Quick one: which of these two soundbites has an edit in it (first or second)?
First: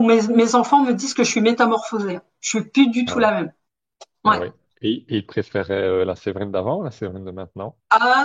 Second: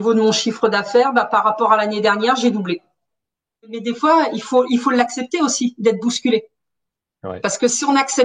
second